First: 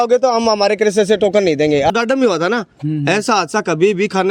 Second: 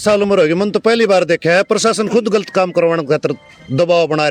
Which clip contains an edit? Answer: first; 1 cut; at 1.9 s

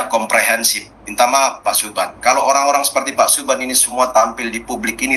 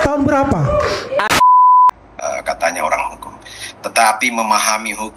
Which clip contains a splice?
second; 2 cuts; at 1.3 s, 1.9 s

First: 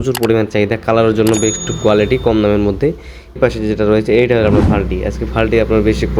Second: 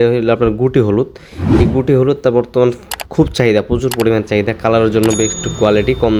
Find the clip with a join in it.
first; 1 cut; at 3.4 s

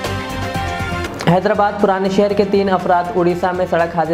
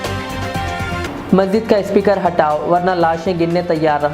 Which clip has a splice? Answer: second; 1 cut; at 1.0 s

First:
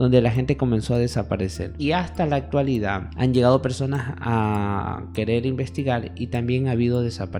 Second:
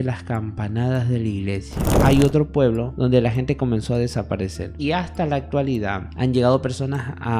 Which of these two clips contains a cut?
second; 1 cut; at 1.9 s

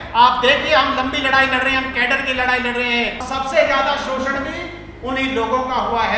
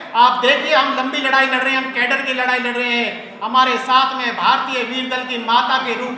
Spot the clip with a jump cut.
first; 1 cut; at 3.3 s

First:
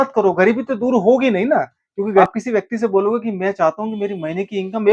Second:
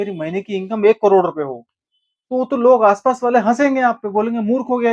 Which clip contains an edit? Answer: first; 1 cut; at 2.2 s

